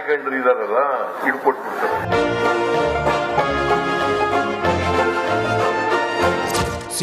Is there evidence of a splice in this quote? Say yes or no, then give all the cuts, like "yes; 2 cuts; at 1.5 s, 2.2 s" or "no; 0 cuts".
yes; 1 cut; at 1.1 s